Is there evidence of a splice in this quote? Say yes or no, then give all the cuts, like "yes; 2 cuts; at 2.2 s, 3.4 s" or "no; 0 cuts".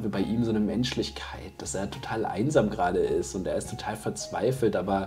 no; 0 cuts